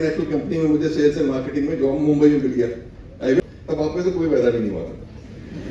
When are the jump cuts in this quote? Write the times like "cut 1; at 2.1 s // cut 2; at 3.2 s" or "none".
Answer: cut 1; at 3.4 s